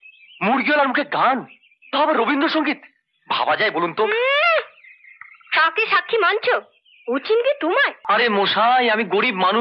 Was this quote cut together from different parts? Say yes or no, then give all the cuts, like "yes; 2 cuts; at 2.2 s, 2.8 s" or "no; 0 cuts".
yes; 1 cut; at 8.0 s